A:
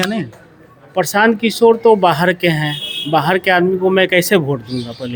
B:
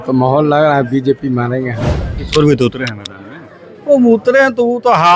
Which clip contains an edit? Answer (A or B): B